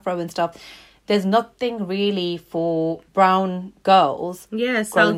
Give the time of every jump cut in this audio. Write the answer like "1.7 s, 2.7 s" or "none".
3.0 s